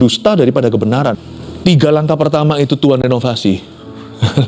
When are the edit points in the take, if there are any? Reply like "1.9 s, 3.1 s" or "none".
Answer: 1.3 s